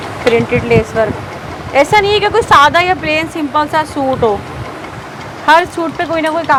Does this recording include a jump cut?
no; 0 cuts

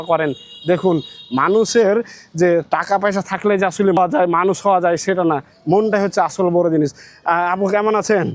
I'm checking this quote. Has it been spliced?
yes; 1 cut; at 4.0 s

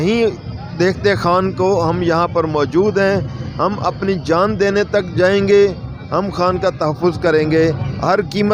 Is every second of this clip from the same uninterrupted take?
yes; 0 cuts

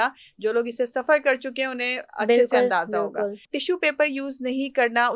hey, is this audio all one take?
no; 1 cut; at 3.5 s

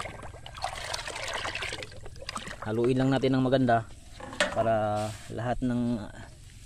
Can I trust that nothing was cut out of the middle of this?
yes; 0 cuts

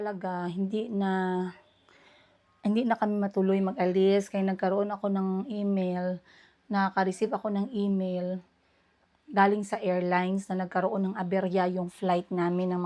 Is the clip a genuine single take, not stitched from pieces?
yes; 0 cuts

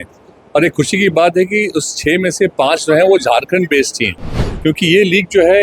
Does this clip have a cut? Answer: yes; 1 cut; at 4.4 s

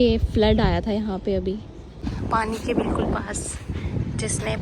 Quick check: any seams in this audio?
yes; 1 cut; at 2.1 s

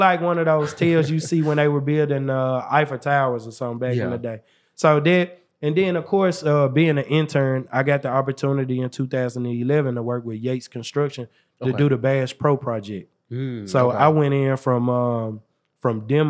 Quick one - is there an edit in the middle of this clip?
no; 0 cuts

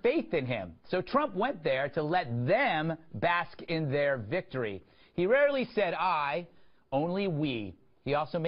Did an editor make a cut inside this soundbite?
yes; 1 cut; at 7.6 s

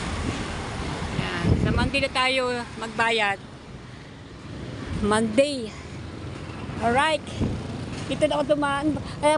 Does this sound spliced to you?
no; 0 cuts

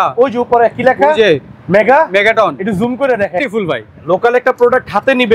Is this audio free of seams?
no; 1 cut; at 3.4 s

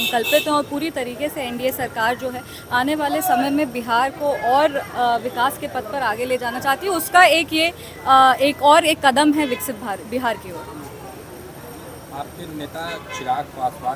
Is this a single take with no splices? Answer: yes; 0 cuts

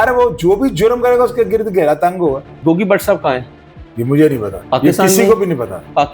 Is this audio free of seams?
no; 2 cuts; at 2.5 s, 4.5 s

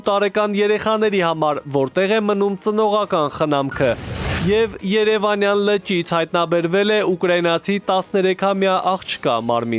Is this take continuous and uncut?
yes; 0 cuts

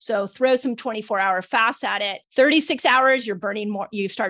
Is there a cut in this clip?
yes; 1 cut; at 2.2 s

